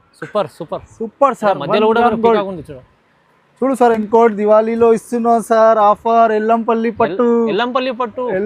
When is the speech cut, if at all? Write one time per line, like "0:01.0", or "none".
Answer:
0:04.0